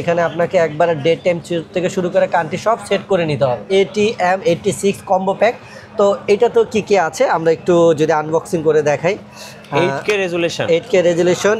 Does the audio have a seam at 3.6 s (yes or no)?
yes